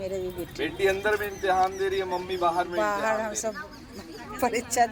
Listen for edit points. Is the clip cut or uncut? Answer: uncut